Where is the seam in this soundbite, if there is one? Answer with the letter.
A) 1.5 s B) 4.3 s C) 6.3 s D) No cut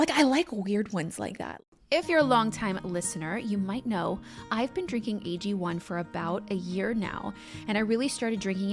A